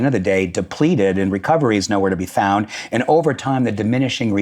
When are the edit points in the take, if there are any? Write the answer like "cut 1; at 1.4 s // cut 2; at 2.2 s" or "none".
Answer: none